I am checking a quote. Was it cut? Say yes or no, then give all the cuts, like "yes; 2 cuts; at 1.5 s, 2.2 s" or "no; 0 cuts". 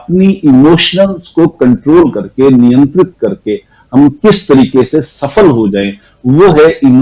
no; 0 cuts